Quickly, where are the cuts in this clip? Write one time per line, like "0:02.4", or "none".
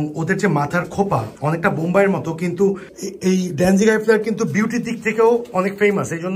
0:02.8

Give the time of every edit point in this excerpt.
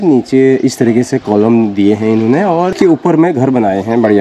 0:02.7

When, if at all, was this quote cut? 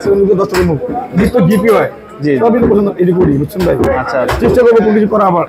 none

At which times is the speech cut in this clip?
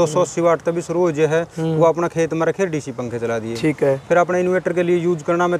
none

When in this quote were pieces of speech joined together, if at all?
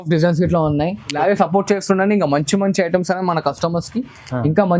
0:01.1

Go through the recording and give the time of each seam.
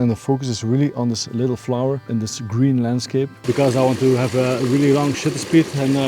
0:02.1
0:03.4

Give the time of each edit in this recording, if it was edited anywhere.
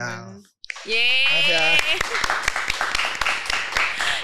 none

